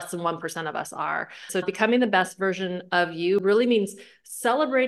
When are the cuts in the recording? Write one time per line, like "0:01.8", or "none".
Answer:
0:01.4